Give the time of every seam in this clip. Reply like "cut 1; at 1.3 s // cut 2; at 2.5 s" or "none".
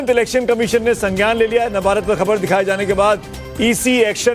cut 1; at 2.0 s